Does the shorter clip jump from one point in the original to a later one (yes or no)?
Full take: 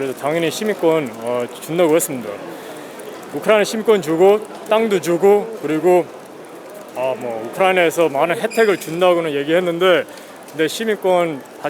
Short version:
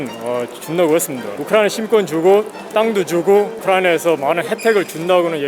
yes